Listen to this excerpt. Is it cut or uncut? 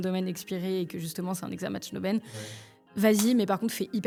uncut